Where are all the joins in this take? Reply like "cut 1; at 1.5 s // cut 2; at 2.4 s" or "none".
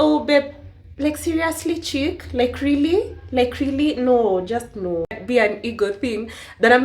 cut 1; at 5.2 s